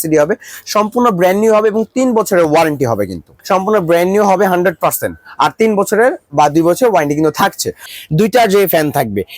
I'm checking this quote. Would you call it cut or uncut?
cut